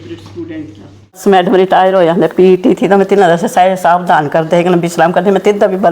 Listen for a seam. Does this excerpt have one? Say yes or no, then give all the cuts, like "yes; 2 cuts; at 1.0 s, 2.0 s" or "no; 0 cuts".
yes; 1 cut; at 1.1 s